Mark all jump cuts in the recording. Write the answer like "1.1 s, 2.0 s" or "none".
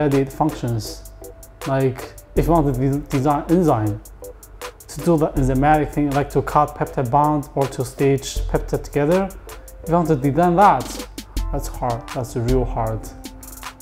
none

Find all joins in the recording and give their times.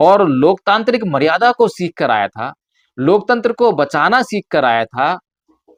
none

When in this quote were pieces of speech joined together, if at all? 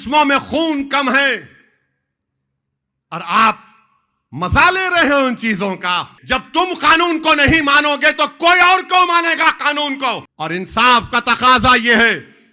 6.1 s, 10.3 s

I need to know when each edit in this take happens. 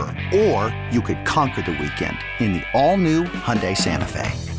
none

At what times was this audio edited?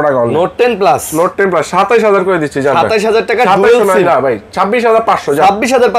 none

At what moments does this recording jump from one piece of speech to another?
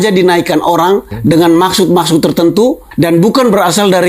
1.1 s, 2.9 s

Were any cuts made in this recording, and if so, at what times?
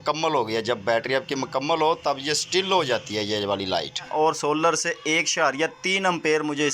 4.1 s

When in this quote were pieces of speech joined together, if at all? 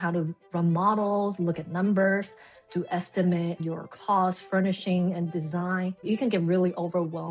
3.6 s, 6.0 s

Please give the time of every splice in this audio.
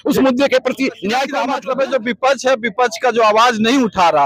1.4 s

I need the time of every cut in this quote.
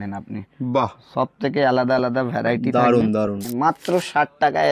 3.5 s

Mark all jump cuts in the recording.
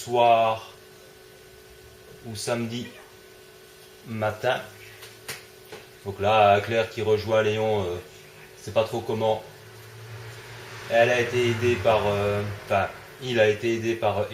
12.2 s

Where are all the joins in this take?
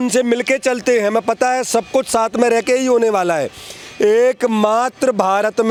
none

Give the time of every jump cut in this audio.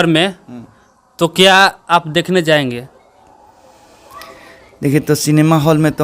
none

